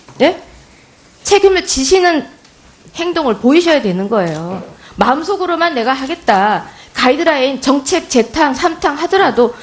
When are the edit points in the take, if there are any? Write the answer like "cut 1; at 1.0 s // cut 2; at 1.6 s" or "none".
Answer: none